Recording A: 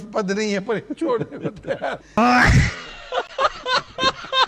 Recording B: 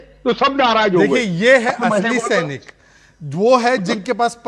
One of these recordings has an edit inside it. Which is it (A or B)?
A